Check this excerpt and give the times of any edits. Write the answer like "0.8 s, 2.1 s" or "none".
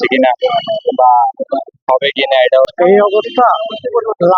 2.7 s